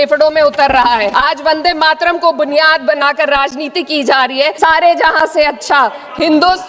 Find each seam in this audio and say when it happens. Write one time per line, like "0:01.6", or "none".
0:01.1
0:04.6